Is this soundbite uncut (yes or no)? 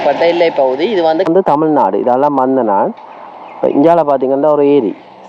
no